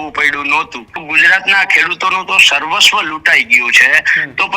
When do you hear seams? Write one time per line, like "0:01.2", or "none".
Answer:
0:01.0